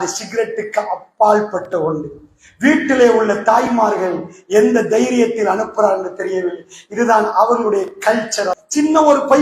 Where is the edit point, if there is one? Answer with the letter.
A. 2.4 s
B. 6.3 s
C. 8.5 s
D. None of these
C